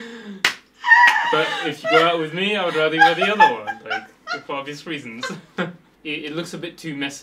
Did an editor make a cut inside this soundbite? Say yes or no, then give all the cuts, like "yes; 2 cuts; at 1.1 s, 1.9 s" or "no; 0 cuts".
yes; 1 cut; at 5.9 s